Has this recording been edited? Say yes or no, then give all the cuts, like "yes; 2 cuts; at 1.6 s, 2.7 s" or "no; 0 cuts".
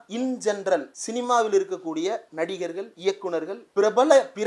yes; 3 cuts; at 1.0 s, 2.9 s, 3.6 s